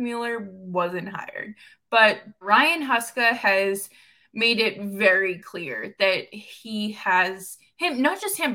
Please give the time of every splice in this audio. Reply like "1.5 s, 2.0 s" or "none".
2.4 s